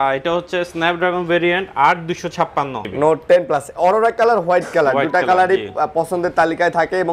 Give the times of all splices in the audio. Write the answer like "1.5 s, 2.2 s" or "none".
2.8 s